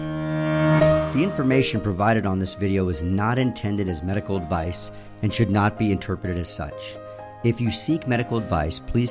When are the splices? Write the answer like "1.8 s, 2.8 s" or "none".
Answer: 1.1 s